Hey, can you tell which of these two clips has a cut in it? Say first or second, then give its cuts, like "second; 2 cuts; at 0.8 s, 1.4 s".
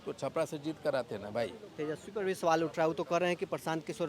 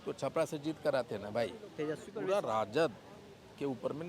second; 1 cut; at 2.1 s